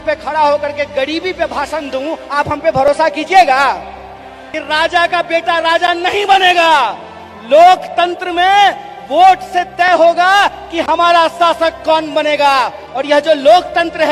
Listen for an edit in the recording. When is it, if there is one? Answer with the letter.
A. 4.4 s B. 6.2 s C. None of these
A